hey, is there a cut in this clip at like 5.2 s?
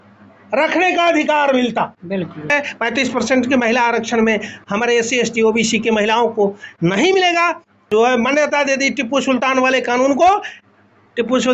no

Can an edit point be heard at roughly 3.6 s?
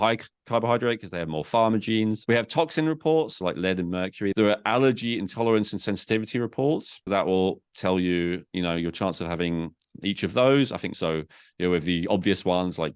yes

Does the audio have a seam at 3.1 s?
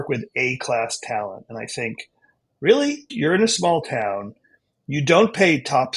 yes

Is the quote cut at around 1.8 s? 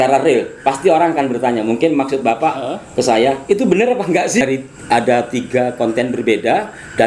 no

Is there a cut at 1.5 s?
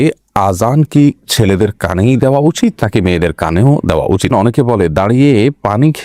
no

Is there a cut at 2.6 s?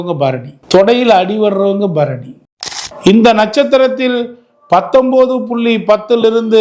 yes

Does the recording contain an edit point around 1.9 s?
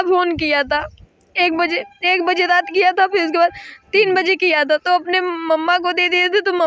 no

